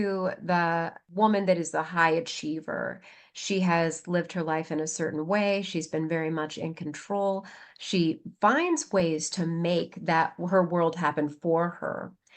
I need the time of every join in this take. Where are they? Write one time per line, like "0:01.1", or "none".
0:01.0